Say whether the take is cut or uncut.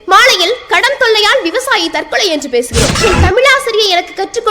cut